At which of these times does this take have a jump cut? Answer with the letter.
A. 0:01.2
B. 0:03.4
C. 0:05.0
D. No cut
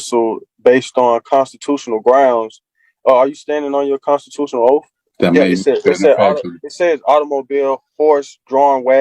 C